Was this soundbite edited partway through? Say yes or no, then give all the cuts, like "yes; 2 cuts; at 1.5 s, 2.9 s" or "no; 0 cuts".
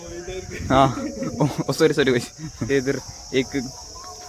yes; 1 cut; at 2.7 s